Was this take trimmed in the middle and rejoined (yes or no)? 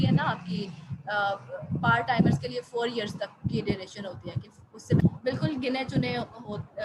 yes